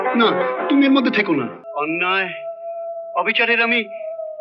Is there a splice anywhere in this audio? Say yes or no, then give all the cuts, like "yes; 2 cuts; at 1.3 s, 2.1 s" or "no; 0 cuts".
yes; 1 cut; at 1.6 s